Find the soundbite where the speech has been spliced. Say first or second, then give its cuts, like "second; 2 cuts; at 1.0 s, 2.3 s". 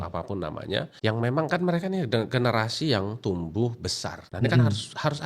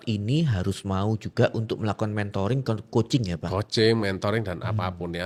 first; 2 cuts; at 0.9 s, 4.2 s